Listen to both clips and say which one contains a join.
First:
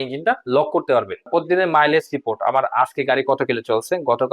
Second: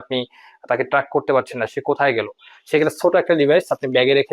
first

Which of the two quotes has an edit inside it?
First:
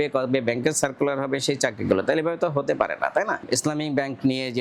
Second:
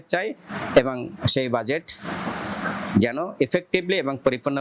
first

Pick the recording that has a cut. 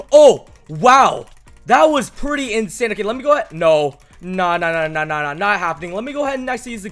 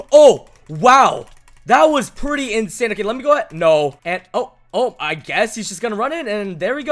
second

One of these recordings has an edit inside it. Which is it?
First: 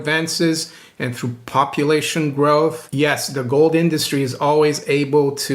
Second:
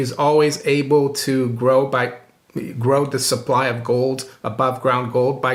first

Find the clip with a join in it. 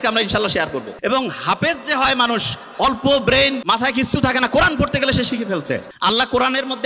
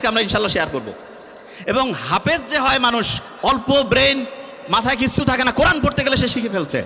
first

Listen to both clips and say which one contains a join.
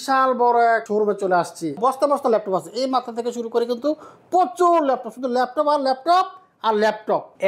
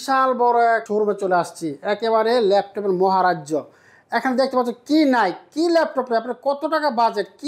first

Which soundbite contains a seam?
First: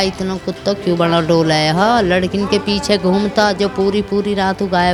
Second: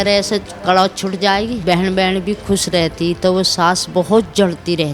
second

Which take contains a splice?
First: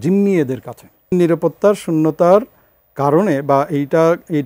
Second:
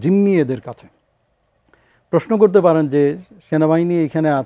first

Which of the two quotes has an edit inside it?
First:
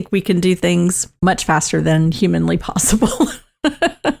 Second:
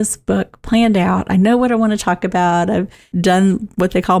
first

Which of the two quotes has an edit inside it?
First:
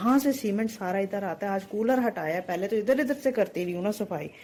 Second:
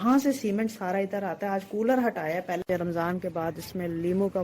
second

